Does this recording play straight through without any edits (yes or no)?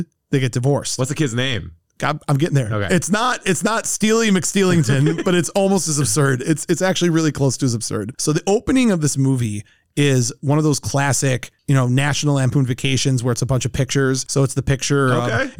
yes